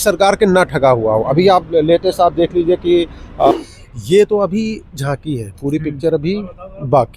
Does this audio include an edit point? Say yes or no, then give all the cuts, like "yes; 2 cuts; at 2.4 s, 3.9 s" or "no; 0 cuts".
yes; 1 cut; at 3.5 s